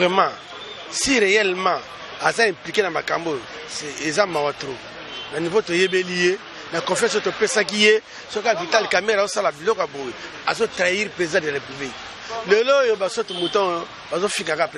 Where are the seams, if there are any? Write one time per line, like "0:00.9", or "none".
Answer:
none